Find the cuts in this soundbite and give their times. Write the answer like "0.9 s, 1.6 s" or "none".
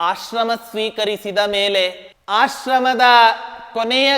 2.1 s

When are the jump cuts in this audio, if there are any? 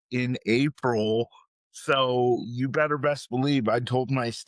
none

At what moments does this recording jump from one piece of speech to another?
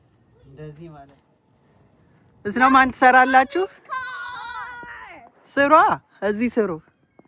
1.2 s

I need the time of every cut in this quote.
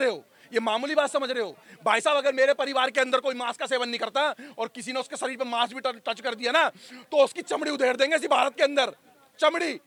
none

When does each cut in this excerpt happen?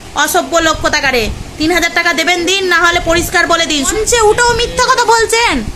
3.9 s

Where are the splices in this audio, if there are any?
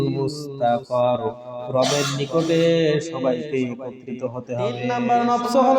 4.2 s

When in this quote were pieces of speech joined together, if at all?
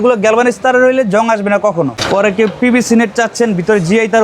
2.3 s

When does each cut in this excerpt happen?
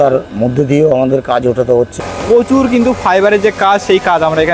2.1 s

